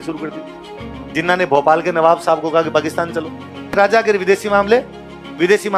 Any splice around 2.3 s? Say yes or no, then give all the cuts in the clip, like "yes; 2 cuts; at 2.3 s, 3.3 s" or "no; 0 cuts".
no; 1 cut; at 3.7 s